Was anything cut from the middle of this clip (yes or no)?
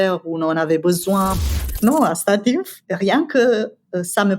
yes